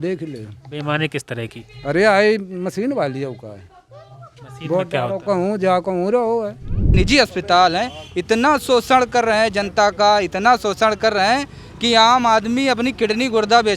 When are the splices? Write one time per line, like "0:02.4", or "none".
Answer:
0:06.9